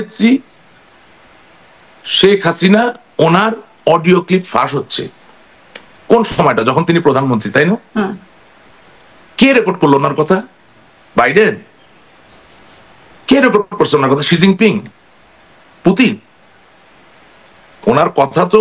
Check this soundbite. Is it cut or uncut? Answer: uncut